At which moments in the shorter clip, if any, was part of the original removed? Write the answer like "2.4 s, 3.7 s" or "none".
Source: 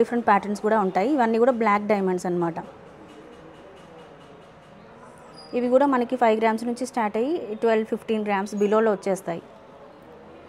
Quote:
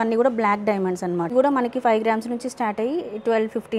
1.3 s